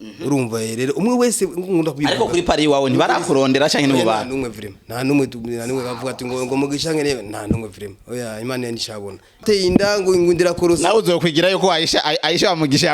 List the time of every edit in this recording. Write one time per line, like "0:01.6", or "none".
0:09.4